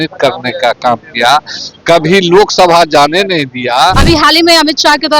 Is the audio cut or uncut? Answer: cut